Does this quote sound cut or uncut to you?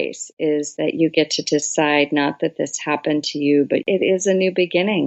cut